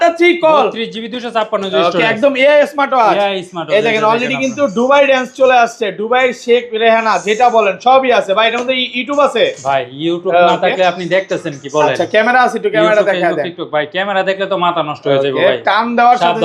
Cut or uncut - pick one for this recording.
uncut